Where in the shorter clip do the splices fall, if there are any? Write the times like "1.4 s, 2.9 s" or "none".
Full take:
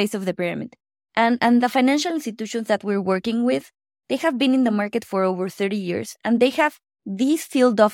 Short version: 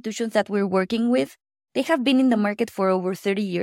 none